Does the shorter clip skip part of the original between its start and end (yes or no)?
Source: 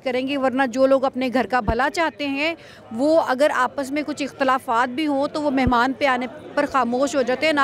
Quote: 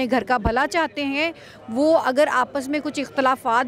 no